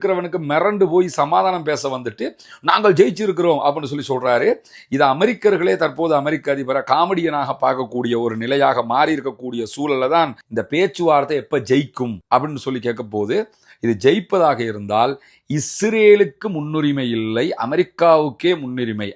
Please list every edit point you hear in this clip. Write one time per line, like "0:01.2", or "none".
0:10.4